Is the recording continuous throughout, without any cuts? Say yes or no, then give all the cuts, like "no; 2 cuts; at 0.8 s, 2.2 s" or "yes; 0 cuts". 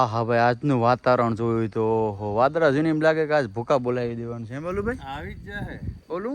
yes; 0 cuts